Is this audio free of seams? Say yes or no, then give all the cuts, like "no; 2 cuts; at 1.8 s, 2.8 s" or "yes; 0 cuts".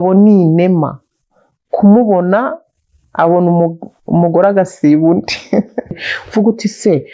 no; 1 cut; at 6.1 s